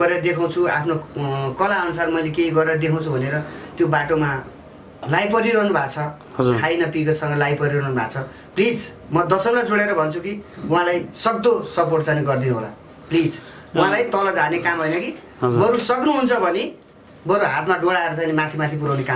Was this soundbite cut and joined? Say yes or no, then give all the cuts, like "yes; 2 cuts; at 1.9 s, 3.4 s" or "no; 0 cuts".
no; 0 cuts